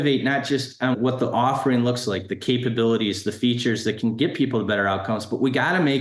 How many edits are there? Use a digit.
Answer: 1